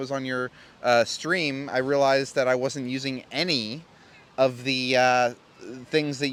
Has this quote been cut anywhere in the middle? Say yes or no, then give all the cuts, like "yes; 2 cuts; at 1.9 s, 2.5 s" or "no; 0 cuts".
no; 0 cuts